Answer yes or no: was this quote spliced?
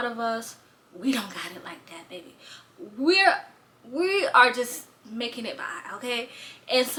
no